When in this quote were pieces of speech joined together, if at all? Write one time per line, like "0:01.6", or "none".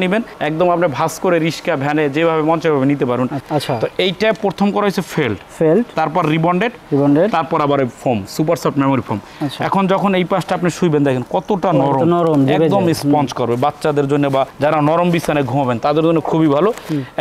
0:03.4